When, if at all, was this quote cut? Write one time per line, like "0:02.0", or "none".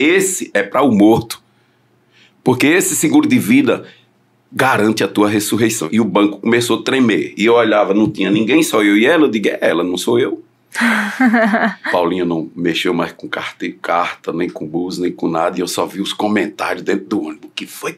0:05.8
0:11.8